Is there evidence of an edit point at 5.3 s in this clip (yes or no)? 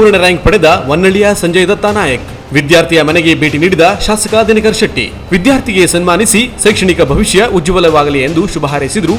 no